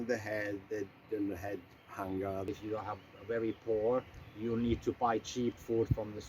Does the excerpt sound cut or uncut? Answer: cut